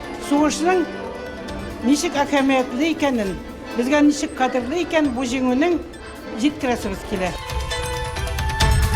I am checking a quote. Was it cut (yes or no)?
yes